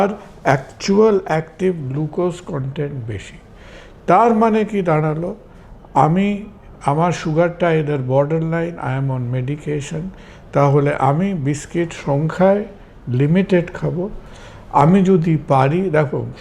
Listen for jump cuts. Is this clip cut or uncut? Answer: uncut